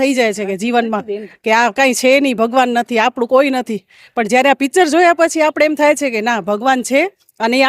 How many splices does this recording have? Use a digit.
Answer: 0